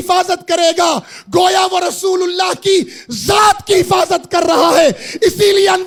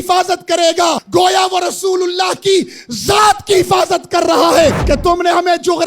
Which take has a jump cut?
second; 2 cuts; at 1.0 s, 4.8 s

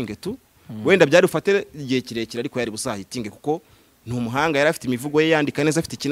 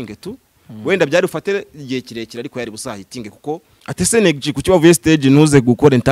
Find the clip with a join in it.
second; 1 cut; at 3.8 s

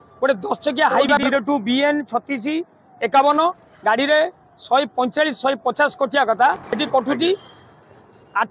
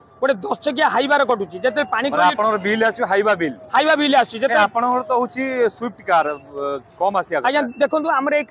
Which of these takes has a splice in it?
first; 2 cuts; at 1.2 s, 6.8 s

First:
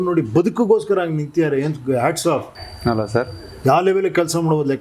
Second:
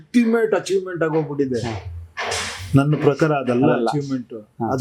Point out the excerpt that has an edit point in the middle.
first; 1 cut; at 2.5 s

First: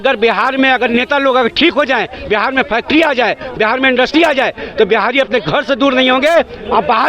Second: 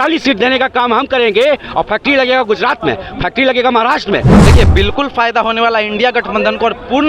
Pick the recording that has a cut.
second; 1 cut; at 4.4 s

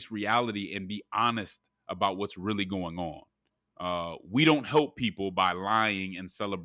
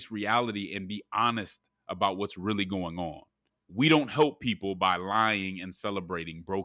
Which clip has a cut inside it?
second; 1 cut; at 3.6 s

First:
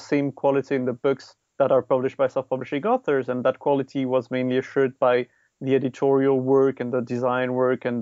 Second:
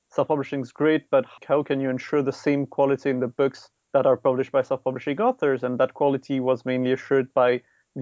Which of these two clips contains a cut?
second; 1 cut; at 1.3 s

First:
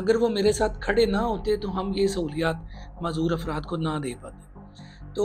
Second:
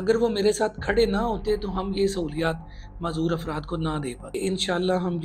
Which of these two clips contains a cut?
second; 1 cut; at 4.2 s

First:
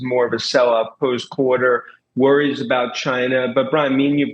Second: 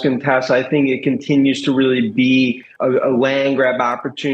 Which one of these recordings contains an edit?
second; 1 cut; at 2.7 s

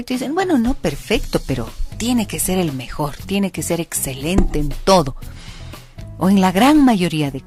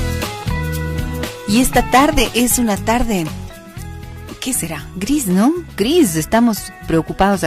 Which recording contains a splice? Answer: second; 1 cut; at 1.1 s

